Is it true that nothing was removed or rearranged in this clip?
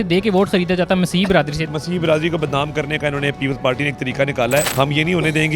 no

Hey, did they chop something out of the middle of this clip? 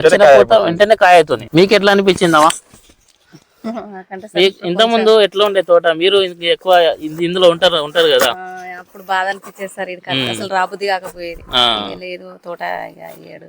yes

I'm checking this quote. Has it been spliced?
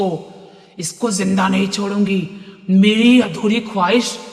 no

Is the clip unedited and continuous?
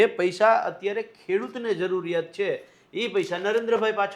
yes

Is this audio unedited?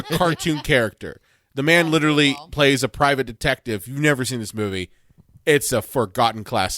yes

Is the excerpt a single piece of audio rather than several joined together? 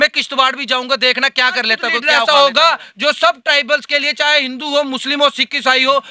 no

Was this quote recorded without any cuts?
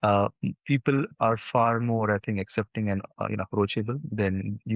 yes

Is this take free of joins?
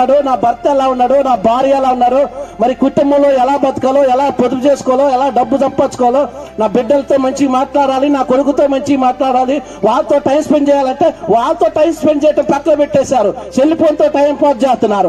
yes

